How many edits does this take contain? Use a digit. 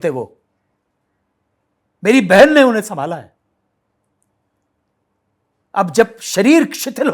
0